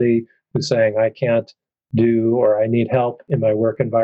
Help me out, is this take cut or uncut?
uncut